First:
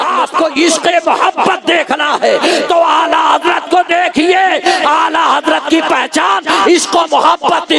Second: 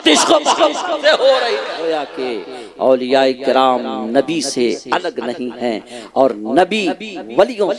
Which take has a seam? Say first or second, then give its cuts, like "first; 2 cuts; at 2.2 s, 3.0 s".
second; 1 cut; at 1.7 s